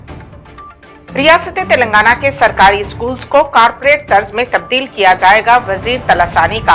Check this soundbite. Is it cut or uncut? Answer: uncut